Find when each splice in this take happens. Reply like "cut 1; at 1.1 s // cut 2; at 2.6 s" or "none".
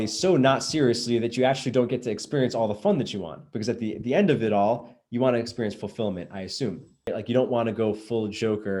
cut 1; at 7.1 s